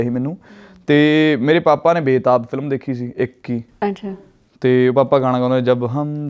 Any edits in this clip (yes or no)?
no